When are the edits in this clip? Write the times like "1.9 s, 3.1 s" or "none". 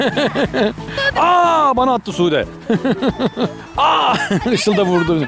1.0 s, 3.6 s